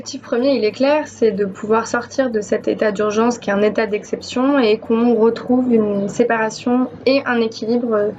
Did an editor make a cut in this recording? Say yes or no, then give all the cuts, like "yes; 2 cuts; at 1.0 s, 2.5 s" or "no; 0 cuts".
no; 0 cuts